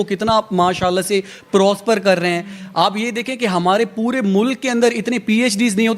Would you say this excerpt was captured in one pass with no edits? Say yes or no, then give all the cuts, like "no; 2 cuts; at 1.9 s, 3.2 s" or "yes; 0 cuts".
yes; 0 cuts